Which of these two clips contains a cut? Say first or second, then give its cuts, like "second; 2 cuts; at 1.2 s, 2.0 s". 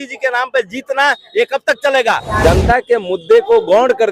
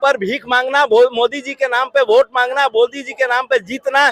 first; 1 cut; at 2.3 s